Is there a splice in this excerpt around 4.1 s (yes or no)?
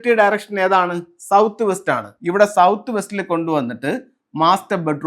no